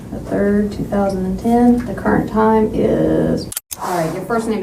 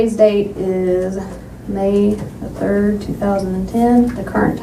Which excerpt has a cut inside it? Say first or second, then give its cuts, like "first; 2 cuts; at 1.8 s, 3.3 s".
first; 1 cut; at 3.5 s